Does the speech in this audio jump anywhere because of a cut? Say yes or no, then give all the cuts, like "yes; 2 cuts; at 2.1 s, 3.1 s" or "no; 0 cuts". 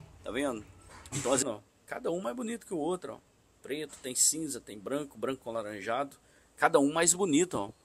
yes; 1 cut; at 1.4 s